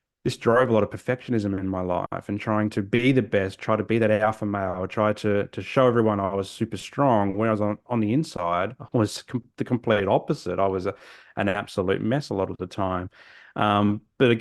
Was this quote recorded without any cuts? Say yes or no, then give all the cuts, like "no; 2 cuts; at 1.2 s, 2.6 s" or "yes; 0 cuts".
yes; 0 cuts